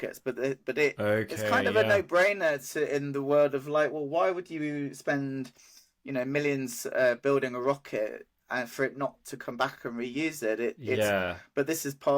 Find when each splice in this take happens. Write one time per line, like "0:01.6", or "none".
none

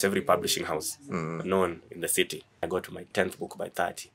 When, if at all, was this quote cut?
0:02.8

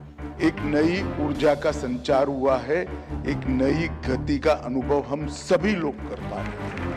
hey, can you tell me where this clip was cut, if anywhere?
0:06.1

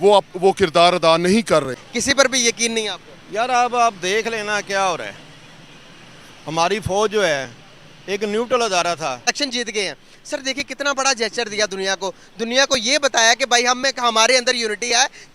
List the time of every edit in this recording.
0:01.9
0:09.3

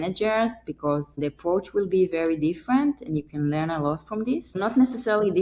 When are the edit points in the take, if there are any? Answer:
0:01.2
0:04.6

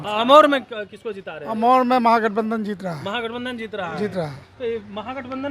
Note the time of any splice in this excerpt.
none

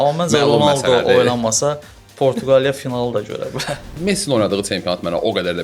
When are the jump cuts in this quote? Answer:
0:04.0

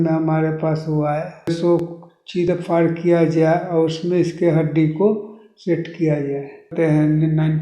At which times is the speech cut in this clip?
0:01.5
0:06.7

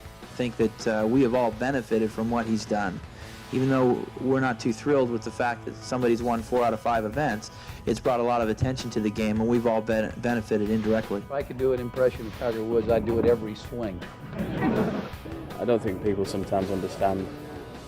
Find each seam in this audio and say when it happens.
0:07.5

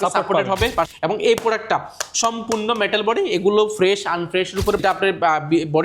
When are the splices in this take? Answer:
0:00.9
0:04.8

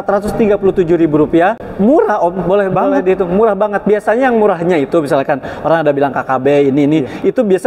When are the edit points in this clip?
0:01.6

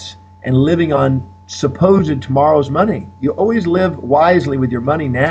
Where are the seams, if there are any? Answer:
0:02.2

